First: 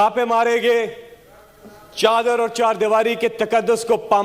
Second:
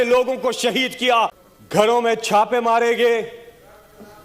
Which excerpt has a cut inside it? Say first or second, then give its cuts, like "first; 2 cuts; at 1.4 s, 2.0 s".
second; 1 cut; at 1.3 s